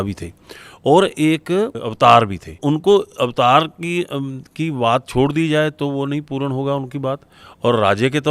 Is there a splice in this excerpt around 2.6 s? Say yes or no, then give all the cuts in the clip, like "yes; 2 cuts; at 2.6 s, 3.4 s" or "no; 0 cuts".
yes; 2 cuts; at 1.8 s, 2.6 s